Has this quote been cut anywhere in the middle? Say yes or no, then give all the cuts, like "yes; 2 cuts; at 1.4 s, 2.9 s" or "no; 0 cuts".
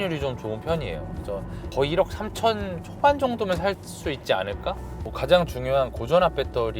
yes; 2 cuts; at 1.7 s, 4.9 s